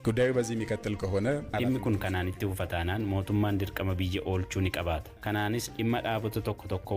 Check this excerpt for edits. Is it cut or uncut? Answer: cut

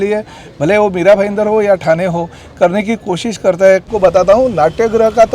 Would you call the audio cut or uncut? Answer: cut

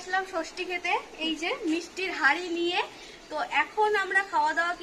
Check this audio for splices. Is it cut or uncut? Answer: uncut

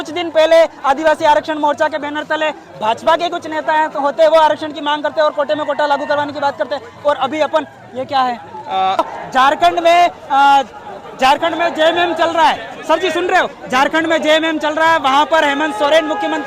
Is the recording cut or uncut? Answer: cut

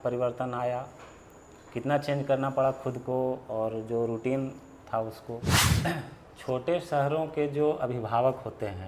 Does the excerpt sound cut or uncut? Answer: cut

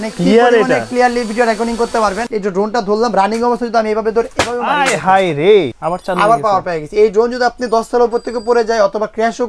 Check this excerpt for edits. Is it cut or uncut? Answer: cut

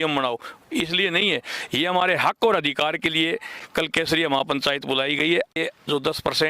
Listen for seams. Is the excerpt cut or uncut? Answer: cut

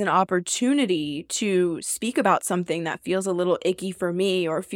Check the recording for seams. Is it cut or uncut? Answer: uncut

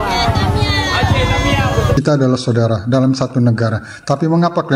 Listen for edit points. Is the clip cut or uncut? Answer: cut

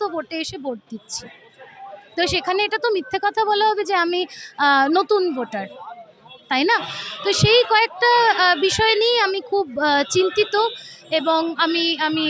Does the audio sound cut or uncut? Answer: uncut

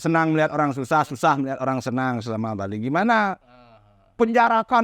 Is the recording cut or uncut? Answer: uncut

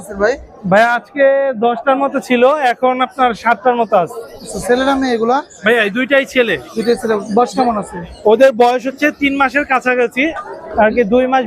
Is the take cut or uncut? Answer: uncut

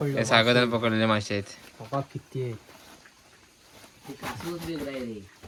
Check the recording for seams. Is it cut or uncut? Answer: uncut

